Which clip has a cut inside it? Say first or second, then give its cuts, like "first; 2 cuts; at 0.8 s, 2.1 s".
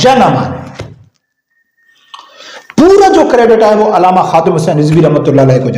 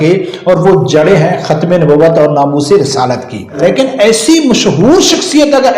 second; 1 cut; at 3.6 s